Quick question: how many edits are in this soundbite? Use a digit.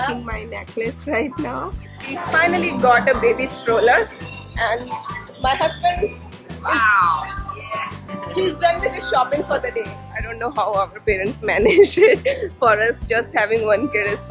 2